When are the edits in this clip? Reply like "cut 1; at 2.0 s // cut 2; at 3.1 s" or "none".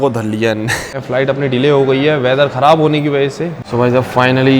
cut 1; at 1.0 s // cut 2; at 3.5 s